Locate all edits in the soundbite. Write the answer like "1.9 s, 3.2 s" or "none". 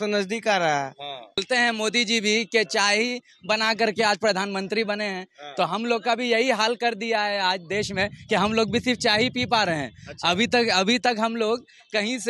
1.4 s